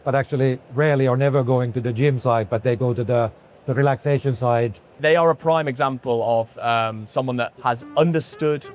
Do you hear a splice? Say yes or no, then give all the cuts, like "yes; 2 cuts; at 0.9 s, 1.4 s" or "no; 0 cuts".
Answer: yes; 2 cuts; at 5.0 s, 7.5 s